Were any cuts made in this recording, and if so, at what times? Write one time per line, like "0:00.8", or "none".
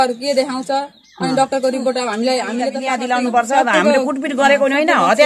0:02.9

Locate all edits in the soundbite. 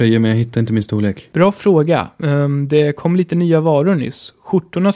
0:01.2

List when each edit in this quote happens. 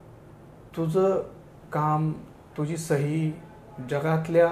none

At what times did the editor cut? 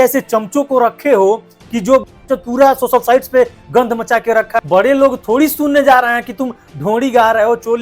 0:04.6

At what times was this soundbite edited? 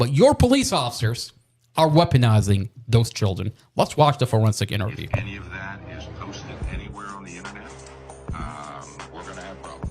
0:05.2

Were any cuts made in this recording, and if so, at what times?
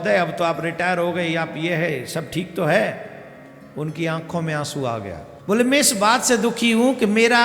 0:05.3

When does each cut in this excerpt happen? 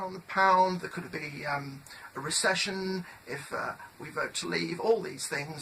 0:02.6

